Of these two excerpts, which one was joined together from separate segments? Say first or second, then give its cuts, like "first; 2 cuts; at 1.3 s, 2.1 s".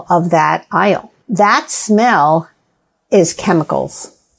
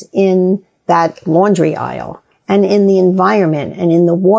first; 1 cut; at 1.2 s